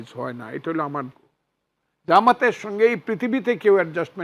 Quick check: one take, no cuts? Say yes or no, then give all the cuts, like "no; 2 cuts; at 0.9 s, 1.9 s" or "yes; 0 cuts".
no; 1 cut; at 1.1 s